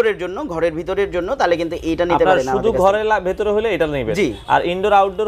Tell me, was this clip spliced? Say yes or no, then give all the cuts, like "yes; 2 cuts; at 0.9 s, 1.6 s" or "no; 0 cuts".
no; 0 cuts